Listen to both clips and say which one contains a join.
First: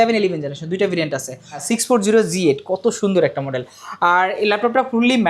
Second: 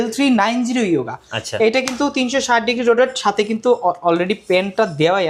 first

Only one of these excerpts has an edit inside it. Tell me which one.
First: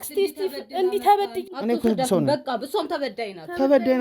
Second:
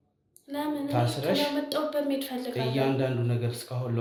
first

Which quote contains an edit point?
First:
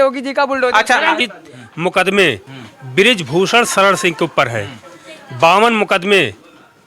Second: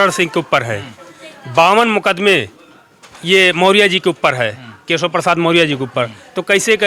first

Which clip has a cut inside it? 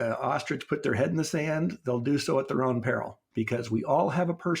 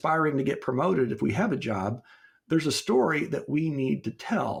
first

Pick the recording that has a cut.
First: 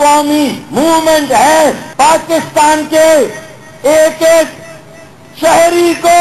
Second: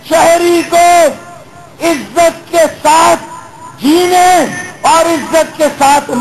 first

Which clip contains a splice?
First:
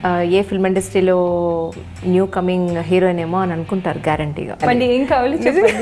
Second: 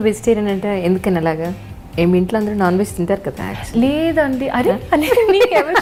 first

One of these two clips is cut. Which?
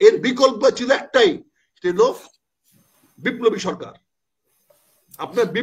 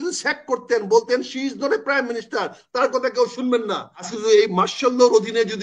second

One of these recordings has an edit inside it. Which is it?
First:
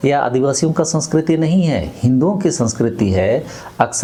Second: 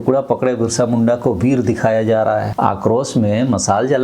second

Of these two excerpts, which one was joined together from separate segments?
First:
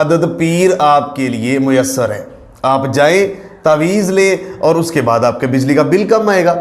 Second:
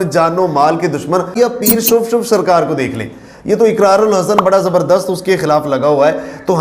second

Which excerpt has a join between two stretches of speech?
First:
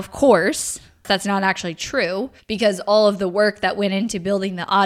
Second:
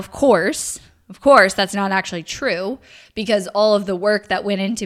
first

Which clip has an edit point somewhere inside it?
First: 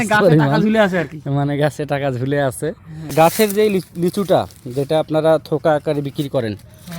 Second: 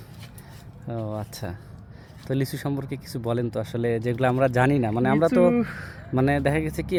first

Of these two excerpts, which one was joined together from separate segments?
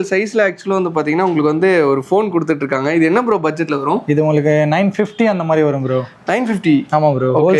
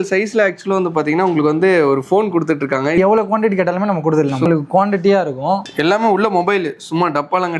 second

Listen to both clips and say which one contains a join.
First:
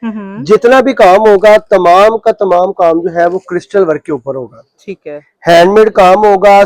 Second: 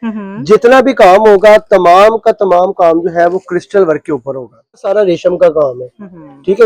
second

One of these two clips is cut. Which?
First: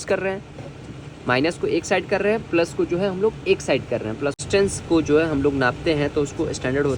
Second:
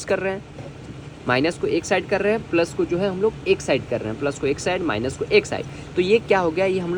first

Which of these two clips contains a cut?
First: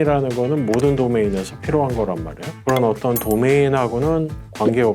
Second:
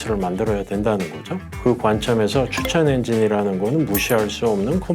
first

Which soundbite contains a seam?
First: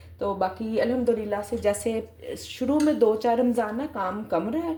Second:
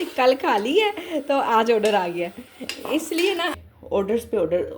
second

